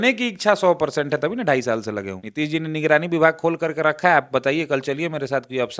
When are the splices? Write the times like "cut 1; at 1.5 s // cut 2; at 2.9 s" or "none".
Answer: cut 1; at 2.2 s

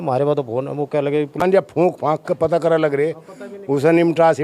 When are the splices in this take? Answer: cut 1; at 1.6 s

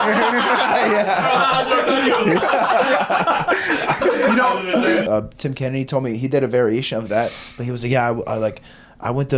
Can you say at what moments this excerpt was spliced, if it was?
cut 1; at 5.1 s

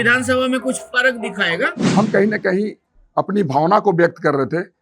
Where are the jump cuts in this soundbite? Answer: cut 1; at 1.8 s

